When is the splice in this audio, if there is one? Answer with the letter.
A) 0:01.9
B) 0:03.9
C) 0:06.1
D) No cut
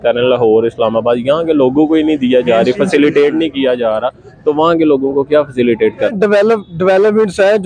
C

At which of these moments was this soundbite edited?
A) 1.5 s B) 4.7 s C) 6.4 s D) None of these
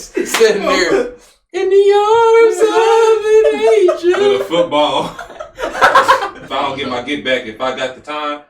C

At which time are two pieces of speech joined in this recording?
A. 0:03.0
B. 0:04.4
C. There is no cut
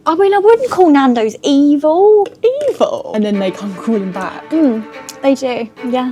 A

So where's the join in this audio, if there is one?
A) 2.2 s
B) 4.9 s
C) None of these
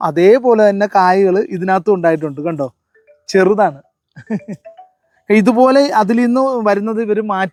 C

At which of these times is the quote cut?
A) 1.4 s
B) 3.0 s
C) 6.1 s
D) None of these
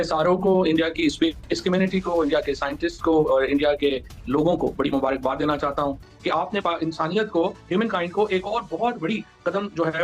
C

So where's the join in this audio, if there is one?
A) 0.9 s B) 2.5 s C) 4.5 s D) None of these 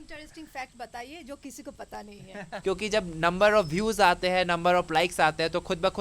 B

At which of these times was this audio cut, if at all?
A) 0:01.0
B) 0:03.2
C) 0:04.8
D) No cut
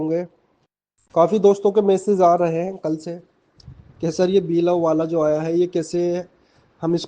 C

